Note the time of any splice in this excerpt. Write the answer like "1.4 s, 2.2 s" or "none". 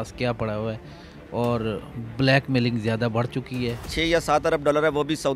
3.9 s

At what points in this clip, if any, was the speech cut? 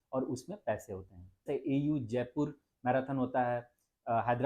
1.5 s

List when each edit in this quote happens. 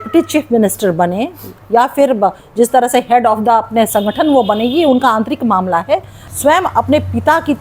6.2 s

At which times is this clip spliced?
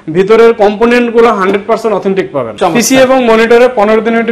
2.5 s

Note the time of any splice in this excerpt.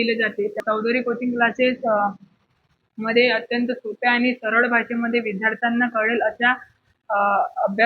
none

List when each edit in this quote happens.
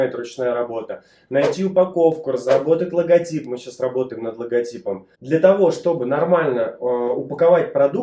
5.1 s

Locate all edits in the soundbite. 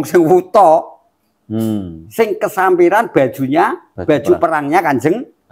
3.9 s

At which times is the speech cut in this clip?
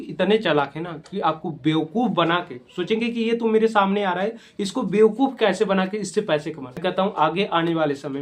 6.8 s

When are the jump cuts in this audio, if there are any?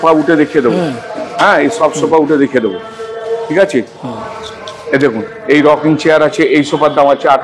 none

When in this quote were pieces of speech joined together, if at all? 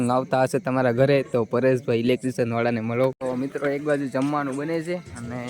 3.2 s

